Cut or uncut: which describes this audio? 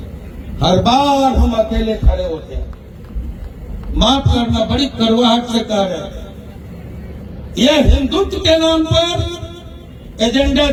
uncut